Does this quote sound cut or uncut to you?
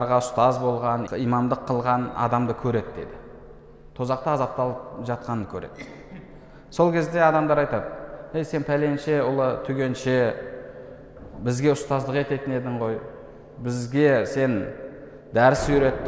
cut